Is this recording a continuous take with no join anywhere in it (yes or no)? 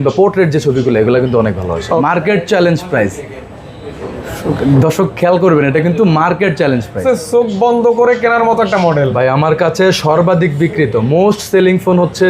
no